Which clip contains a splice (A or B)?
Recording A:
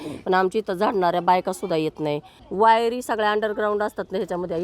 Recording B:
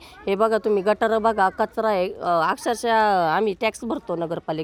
A